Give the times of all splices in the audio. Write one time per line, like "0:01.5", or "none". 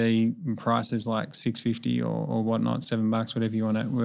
none